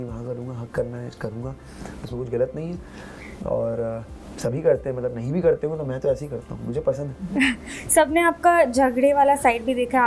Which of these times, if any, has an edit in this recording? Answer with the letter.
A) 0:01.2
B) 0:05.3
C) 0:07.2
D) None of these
D